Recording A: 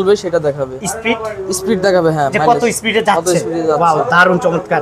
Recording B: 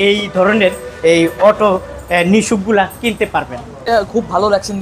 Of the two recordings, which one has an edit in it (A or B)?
B